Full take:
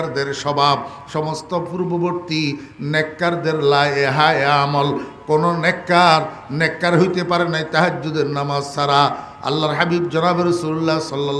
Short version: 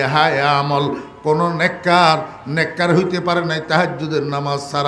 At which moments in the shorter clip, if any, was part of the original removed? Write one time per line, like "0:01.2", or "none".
none